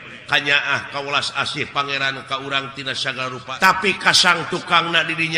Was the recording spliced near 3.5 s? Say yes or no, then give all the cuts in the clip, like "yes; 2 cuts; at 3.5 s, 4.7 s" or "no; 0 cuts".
yes; 1 cut; at 3.5 s